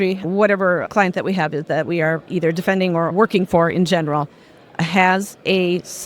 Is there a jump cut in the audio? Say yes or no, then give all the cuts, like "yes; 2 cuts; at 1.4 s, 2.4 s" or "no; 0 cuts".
yes; 2 cuts; at 0.8 s, 2.2 s